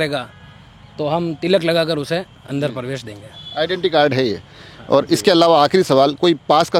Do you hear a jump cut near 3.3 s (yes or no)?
no